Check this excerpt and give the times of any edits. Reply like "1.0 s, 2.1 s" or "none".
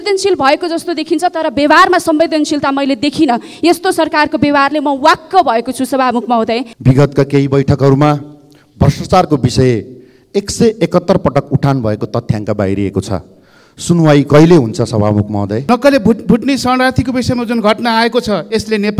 6.7 s, 15.6 s